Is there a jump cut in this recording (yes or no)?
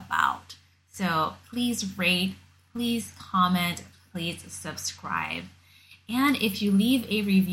no